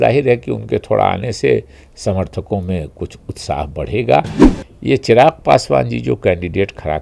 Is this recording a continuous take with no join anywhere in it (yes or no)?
no